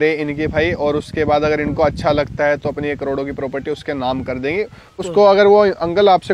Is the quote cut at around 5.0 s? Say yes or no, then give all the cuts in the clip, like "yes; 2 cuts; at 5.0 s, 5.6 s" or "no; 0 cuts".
yes; 1 cut; at 5.0 s